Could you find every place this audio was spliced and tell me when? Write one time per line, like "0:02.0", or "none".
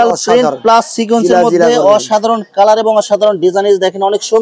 none